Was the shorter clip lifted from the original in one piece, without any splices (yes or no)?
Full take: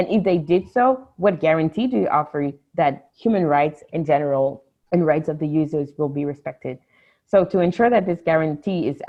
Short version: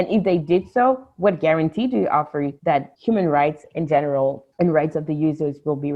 no